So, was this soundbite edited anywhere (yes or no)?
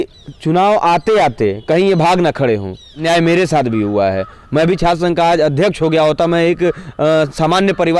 yes